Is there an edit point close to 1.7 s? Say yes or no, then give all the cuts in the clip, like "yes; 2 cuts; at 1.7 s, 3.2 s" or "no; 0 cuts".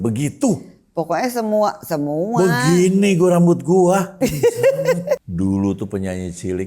no; 2 cuts; at 4.1 s, 5.3 s